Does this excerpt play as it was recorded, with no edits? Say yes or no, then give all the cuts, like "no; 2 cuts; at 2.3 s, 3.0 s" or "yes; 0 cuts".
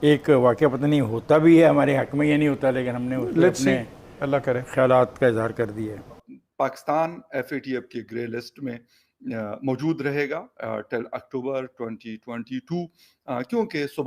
no; 1 cut; at 6.1 s